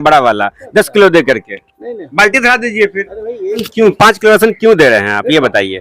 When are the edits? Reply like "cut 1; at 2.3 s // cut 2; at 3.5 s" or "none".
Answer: cut 1; at 3.6 s

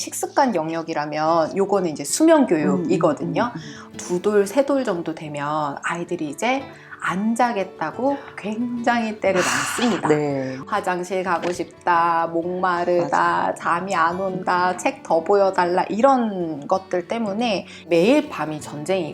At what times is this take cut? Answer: cut 1; at 10.6 s // cut 2; at 17.8 s

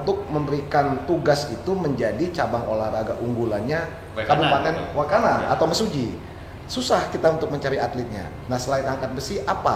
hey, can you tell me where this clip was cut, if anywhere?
none

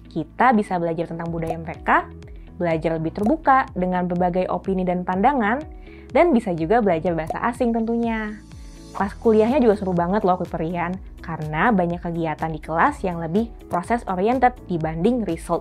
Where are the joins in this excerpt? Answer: none

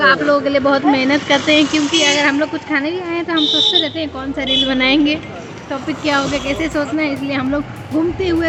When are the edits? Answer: none

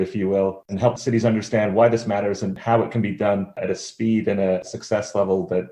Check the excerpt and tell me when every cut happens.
cut 1; at 1.0 s // cut 2; at 2.6 s // cut 3; at 3.6 s // cut 4; at 4.6 s

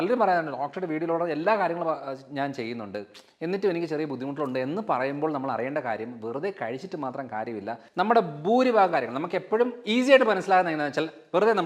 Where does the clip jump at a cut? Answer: cut 1; at 7.8 s

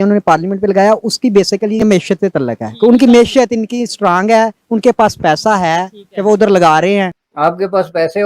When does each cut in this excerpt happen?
cut 1; at 1.8 s // cut 2; at 7.2 s

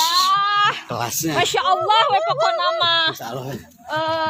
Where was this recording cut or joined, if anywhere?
none

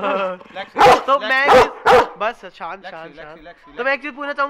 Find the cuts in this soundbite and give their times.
none

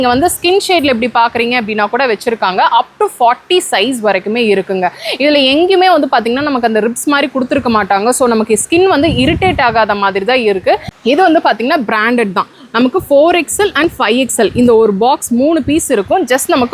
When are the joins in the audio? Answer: cut 1; at 10.9 s

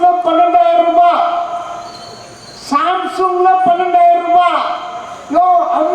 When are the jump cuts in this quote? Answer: none

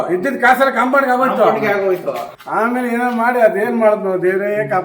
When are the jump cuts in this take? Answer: cut 1; at 2.3 s

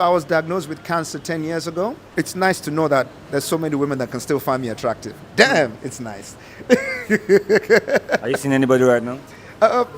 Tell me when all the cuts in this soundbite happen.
cut 1; at 2.0 s

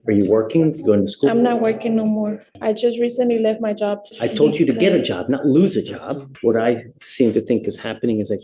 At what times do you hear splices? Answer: cut 1; at 2.4 s // cut 2; at 4.1 s // cut 3; at 6.3 s

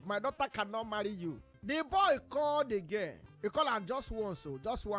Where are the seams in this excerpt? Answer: cut 1; at 1.5 s // cut 2; at 3.2 s

